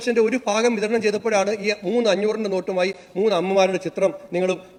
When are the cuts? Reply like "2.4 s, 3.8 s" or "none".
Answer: none